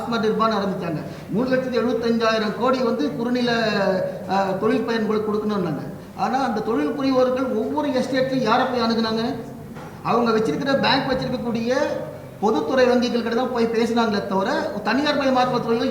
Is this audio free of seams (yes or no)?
yes